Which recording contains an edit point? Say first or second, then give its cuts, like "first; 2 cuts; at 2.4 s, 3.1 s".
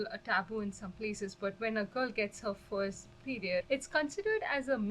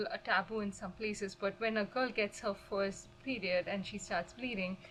first; 1 cut; at 3.6 s